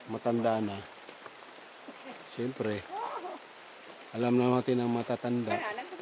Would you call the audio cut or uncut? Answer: uncut